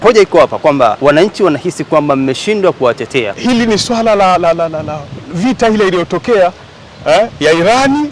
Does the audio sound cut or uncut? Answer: cut